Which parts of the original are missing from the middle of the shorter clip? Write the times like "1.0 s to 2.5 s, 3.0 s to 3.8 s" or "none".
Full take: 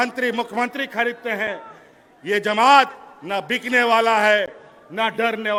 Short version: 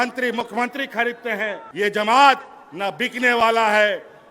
1.6 s to 2.1 s